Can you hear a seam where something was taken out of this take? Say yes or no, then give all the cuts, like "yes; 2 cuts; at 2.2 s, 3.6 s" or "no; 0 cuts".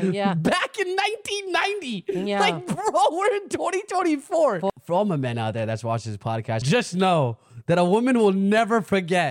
yes; 2 cuts; at 4.7 s, 6.6 s